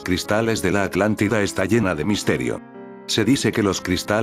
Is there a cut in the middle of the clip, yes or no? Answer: yes